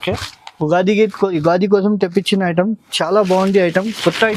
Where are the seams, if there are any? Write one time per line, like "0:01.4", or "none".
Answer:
none